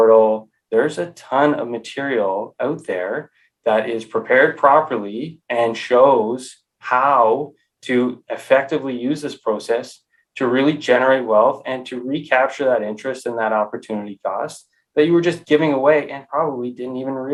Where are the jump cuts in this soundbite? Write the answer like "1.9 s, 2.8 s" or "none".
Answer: none